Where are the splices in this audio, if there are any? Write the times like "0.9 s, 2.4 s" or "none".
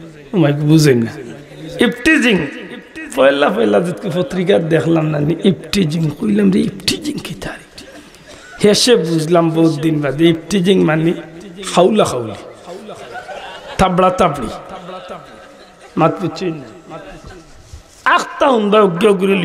none